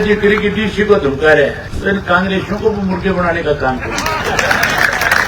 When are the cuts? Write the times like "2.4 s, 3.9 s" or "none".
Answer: 1.7 s